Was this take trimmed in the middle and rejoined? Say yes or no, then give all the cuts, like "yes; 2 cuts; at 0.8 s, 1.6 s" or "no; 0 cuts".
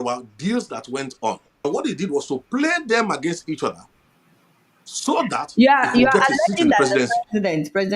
yes; 1 cut; at 1.7 s